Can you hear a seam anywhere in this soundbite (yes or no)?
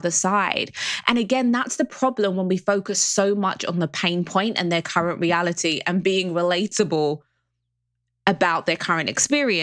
no